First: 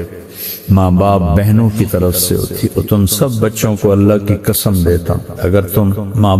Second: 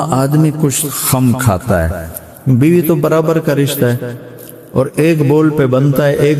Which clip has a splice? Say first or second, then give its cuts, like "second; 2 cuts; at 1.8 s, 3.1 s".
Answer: first; 2 cuts; at 2.7 s, 5.2 s